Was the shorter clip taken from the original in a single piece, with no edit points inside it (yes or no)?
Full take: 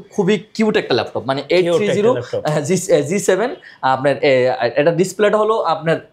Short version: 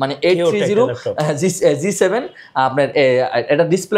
yes